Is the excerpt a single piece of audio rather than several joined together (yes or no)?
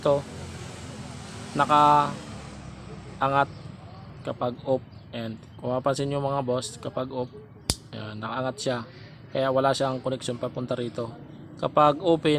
yes